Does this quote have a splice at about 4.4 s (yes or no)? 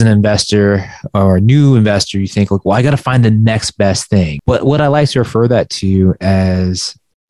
yes